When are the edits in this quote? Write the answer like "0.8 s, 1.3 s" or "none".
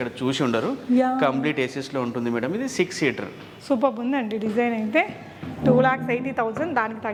none